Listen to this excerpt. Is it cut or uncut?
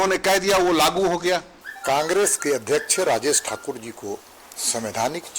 cut